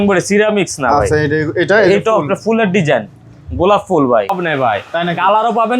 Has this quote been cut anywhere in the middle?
yes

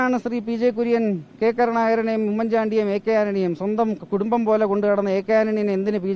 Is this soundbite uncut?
yes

